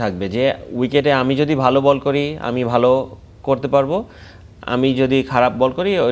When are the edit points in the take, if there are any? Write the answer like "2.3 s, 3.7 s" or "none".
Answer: none